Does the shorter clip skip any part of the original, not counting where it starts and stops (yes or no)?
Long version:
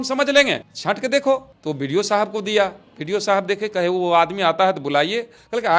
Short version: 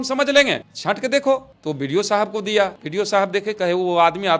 yes